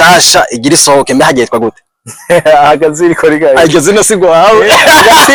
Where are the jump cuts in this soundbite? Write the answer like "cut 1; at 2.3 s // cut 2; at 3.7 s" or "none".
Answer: none